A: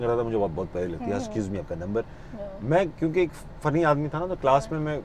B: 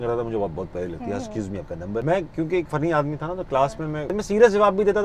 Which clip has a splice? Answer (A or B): B